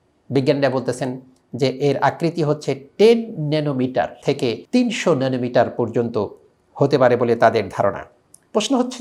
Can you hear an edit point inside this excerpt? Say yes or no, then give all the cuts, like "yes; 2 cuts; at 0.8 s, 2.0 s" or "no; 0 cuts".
no; 0 cuts